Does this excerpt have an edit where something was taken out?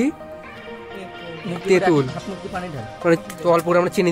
yes; 1 cut; at 3.2 s

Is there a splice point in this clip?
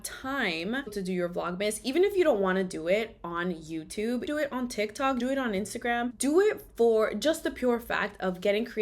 yes; 1 cut; at 1.0 s

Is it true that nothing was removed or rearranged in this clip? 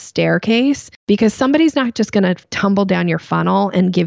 no; 1 cut; at 2.5 s

